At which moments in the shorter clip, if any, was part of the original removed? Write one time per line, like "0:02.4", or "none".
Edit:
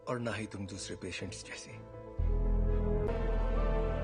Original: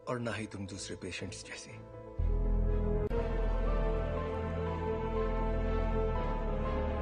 0:03.1